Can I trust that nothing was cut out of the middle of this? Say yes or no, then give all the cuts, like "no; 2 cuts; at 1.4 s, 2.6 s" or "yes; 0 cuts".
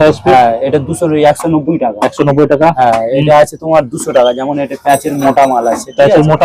yes; 0 cuts